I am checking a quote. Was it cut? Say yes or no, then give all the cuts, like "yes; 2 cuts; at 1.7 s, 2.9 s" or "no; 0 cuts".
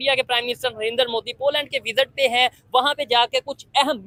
no; 0 cuts